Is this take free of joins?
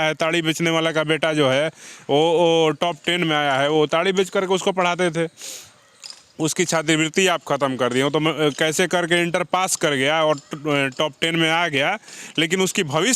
yes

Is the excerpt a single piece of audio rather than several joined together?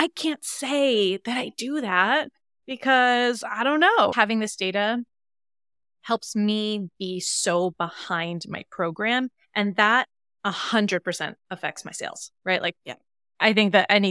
no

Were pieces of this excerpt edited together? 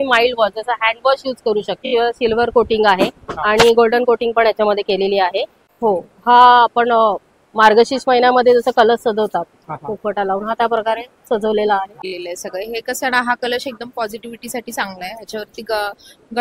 yes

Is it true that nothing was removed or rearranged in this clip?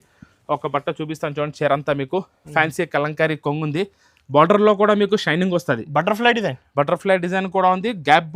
yes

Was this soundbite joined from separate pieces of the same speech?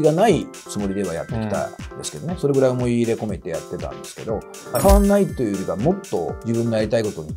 yes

